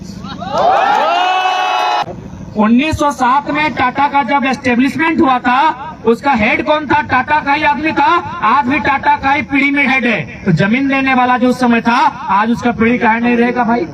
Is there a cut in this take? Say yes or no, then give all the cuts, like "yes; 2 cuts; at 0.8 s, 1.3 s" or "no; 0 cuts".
yes; 1 cut; at 2.0 s